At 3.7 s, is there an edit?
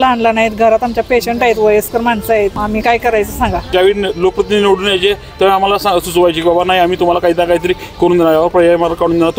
yes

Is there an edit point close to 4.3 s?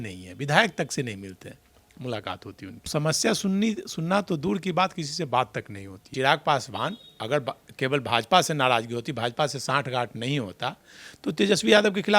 no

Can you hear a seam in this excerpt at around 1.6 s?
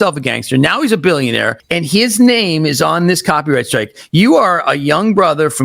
yes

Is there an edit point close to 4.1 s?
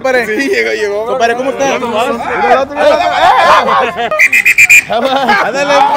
yes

